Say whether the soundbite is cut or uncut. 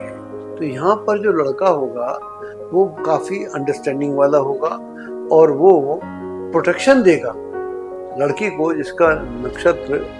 uncut